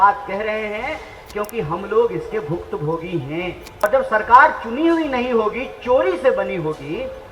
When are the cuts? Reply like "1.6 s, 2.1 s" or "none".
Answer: 3.6 s